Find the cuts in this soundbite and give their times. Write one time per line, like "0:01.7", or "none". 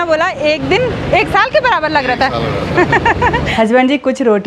0:03.5

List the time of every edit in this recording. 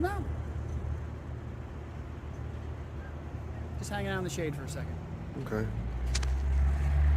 none

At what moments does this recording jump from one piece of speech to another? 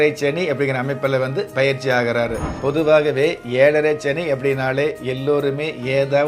0:02.5

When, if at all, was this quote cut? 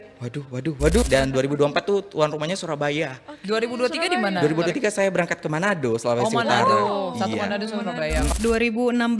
0:01.0
0:08.3

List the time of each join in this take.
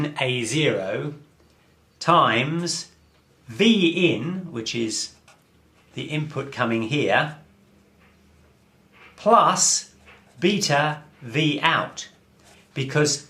0:10.4

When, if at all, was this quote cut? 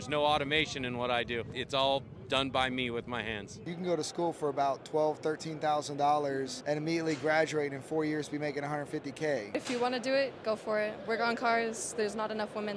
0:01.5
0:03.6
0:06.5
0:09.5

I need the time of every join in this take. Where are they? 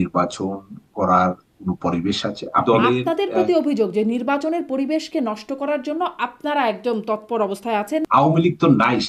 0:02.6
0:08.0

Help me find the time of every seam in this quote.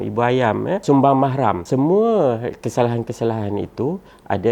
0:00.8
0:01.6

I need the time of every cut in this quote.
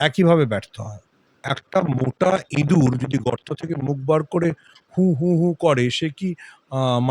0:01.4

